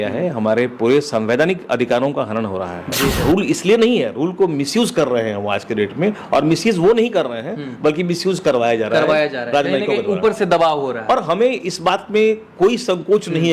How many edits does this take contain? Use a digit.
1